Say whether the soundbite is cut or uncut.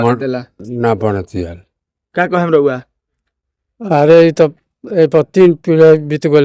uncut